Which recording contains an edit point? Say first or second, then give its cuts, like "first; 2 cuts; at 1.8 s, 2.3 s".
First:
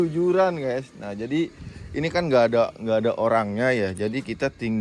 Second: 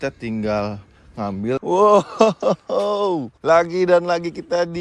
second; 2 cuts; at 1.6 s, 3.3 s